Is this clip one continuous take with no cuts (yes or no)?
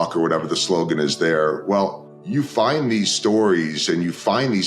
no